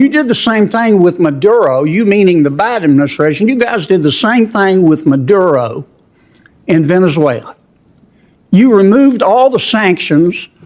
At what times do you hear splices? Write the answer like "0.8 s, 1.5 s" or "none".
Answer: none